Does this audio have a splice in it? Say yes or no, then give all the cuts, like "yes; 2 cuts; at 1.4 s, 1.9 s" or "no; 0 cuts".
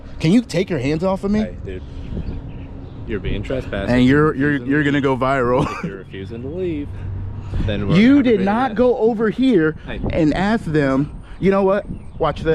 no; 0 cuts